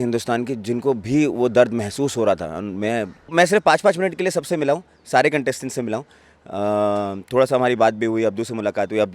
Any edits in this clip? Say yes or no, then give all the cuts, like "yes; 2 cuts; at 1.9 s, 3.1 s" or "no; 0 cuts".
yes; 1 cut; at 3.3 s